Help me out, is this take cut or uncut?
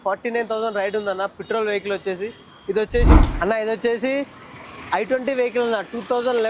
cut